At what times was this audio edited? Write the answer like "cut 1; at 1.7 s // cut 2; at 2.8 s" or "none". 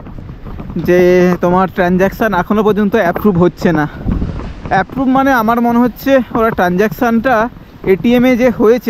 none